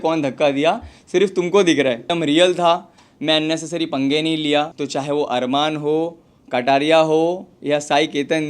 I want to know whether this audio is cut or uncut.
cut